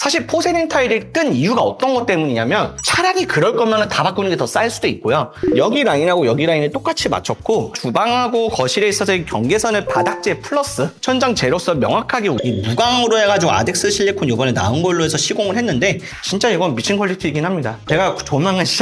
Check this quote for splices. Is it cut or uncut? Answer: cut